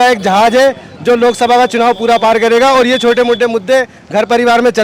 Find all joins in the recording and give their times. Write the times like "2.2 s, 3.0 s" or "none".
none